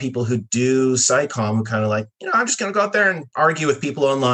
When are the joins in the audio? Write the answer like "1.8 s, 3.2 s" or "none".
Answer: 3.2 s